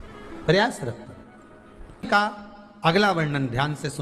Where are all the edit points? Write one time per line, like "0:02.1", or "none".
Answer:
0:02.1